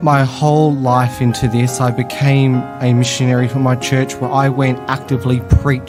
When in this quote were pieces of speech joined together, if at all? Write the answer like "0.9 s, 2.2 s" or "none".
none